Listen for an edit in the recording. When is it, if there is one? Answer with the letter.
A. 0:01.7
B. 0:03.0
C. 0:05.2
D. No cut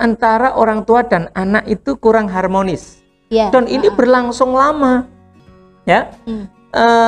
D